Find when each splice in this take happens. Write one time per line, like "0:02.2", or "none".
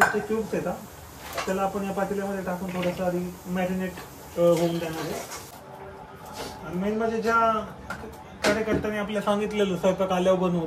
0:05.4